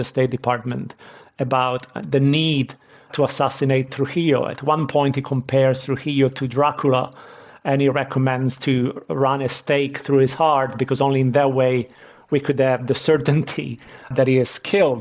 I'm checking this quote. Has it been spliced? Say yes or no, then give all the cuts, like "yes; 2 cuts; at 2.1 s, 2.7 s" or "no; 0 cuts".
yes; 1 cut; at 14.1 s